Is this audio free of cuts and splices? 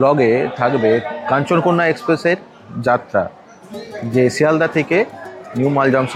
yes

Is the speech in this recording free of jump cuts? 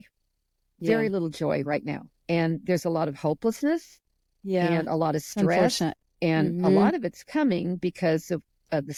yes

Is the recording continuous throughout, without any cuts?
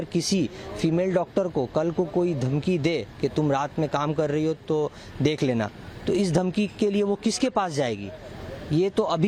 yes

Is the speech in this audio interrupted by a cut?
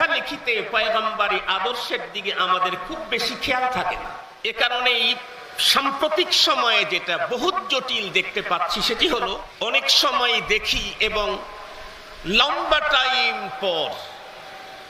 yes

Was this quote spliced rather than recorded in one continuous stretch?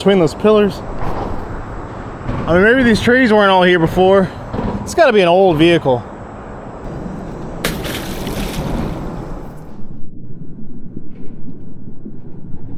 no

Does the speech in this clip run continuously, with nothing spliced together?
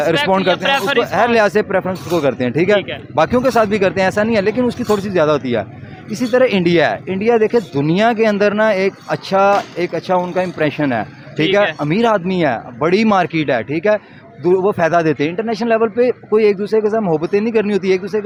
yes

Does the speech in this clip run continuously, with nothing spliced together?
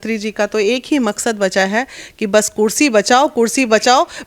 yes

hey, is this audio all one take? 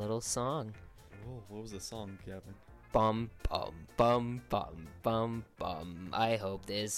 yes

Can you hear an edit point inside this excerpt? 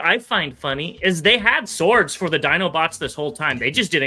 no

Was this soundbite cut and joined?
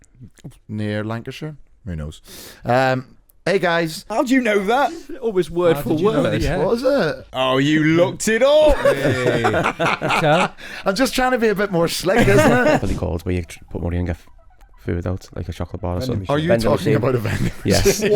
yes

